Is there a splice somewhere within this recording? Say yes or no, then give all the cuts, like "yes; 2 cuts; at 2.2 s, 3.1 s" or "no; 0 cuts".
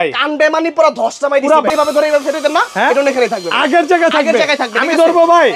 yes; 1 cut; at 1.7 s